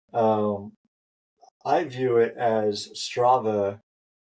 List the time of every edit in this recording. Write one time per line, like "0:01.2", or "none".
none